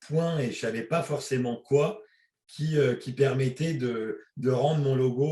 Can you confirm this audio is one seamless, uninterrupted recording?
yes; 0 cuts

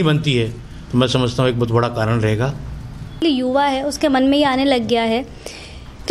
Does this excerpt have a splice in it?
yes; 1 cut; at 3.2 s

